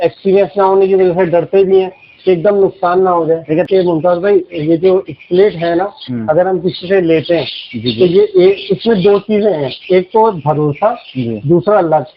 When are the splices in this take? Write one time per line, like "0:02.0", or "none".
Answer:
0:03.7